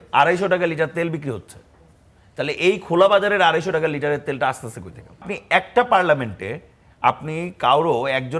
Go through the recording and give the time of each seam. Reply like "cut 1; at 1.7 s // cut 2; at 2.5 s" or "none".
cut 1; at 5.4 s